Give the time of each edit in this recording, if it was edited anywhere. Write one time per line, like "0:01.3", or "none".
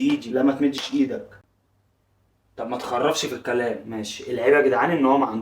none